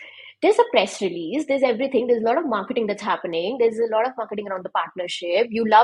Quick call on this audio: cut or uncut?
uncut